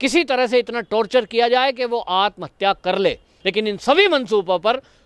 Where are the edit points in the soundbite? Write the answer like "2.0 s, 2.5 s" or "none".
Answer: 3.3 s